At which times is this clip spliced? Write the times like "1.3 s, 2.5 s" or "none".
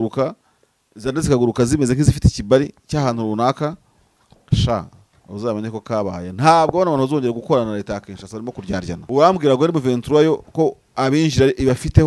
9.0 s